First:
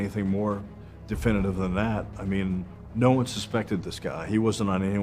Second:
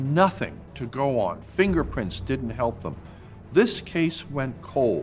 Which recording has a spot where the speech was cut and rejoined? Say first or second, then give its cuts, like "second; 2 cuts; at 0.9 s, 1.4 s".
first; 1 cut; at 2.8 s